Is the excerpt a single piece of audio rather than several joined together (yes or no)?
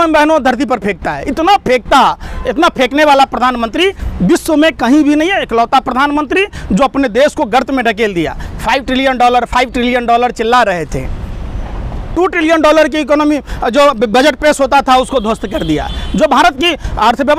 yes